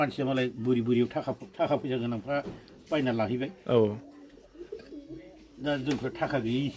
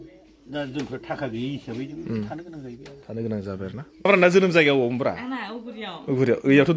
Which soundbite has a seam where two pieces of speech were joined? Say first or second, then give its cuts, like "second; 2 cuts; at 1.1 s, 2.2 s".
second; 1 cut; at 4.1 s